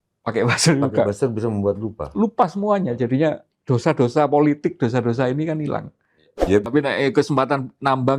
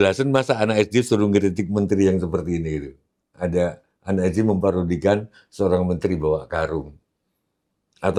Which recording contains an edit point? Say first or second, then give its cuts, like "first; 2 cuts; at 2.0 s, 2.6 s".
first; 2 cuts; at 3.5 s, 6.7 s